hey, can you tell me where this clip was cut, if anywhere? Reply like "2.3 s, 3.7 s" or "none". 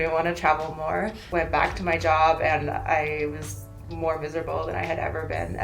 1.2 s